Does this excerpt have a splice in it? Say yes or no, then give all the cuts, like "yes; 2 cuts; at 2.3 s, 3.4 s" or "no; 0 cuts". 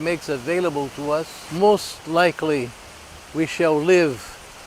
yes; 1 cut; at 1.4 s